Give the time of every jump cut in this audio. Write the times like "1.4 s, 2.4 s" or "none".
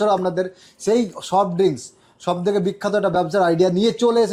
none